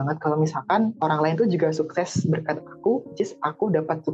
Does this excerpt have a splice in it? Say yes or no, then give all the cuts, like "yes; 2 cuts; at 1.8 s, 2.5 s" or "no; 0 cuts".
yes; 1 cut; at 0.9 s